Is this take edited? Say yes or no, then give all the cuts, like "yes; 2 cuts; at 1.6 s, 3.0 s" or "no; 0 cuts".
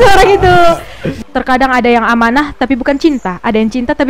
yes; 1 cut; at 1.2 s